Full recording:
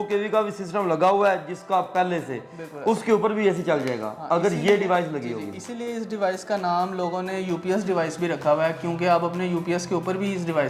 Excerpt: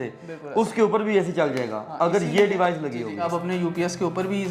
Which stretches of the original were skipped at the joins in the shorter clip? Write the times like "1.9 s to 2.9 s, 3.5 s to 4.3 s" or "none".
5.6 s to 9.2 s